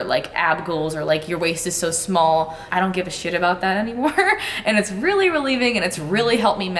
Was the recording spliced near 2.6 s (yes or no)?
yes